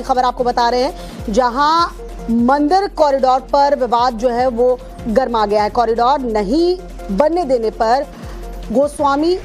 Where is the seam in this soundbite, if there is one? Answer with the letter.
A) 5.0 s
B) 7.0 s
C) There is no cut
B